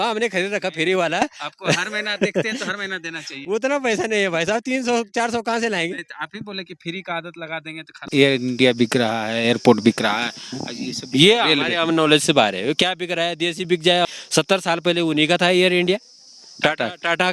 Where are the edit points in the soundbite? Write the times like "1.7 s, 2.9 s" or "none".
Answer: 8.0 s, 14.0 s